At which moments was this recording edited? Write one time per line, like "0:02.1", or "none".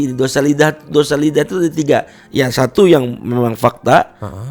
none

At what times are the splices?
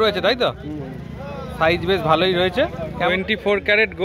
0:03.1

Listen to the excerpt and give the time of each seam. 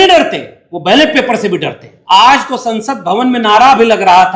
0:01.9

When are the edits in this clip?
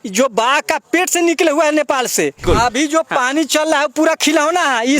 0:02.4

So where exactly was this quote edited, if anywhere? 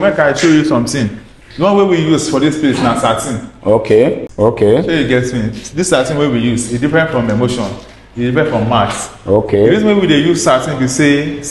0:04.3

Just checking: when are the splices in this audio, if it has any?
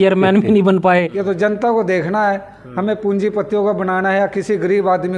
0:01.1

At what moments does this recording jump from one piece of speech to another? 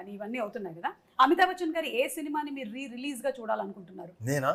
none

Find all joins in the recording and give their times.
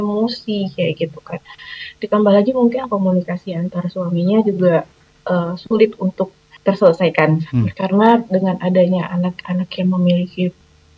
0:06.4
0:07.7

